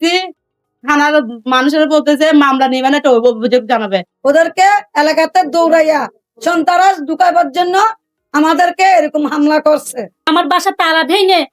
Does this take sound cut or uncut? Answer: cut